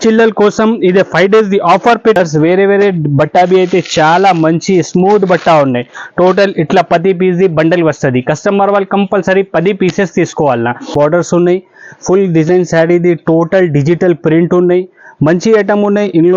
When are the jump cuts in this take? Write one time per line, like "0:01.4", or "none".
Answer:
0:02.2
0:10.9